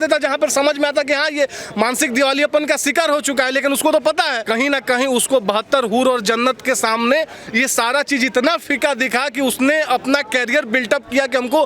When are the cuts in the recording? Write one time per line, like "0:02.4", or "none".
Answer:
0:04.4